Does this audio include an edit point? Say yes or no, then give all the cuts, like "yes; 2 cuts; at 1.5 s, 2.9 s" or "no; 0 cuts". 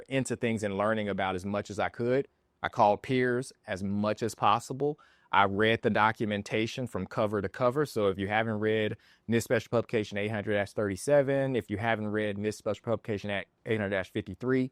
no; 0 cuts